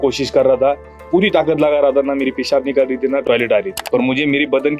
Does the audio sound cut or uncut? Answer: cut